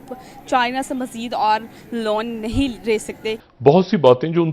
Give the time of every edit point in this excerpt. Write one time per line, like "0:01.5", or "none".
0:03.3

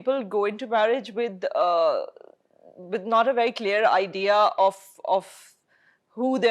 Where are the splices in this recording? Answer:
none

